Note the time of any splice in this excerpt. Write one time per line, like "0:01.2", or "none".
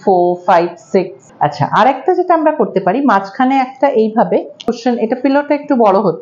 0:01.2

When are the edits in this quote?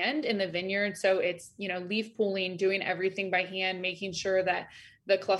none

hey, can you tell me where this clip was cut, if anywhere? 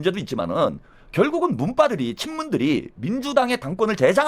none

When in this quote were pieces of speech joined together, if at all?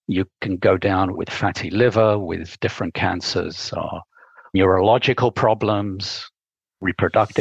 0:01.2
0:02.5
0:04.5

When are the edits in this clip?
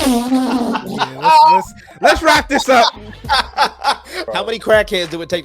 0:04.2

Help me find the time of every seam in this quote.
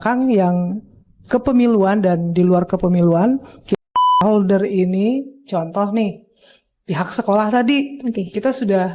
0:03.8

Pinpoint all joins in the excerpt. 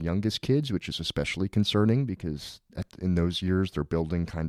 none

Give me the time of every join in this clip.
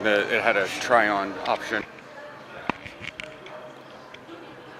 0:01.8

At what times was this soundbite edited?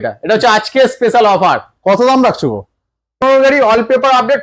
0:03.2

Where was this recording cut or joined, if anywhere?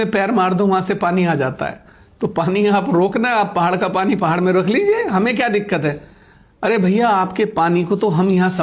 none

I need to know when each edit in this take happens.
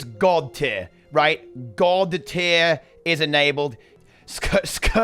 0:03.9

